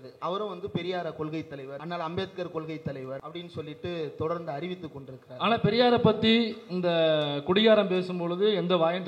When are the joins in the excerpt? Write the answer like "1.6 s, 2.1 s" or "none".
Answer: 1.8 s, 3.3 s